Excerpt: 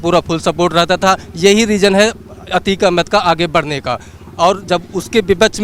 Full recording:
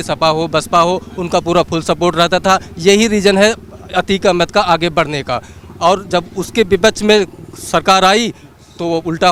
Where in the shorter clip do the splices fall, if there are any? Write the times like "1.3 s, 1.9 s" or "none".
none